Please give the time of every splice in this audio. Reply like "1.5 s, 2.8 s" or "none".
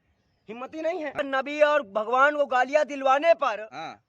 1.2 s